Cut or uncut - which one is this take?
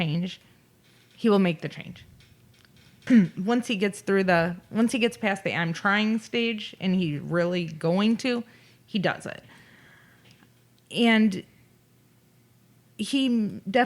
cut